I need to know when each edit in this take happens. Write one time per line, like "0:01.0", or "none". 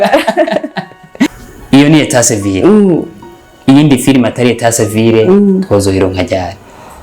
0:01.3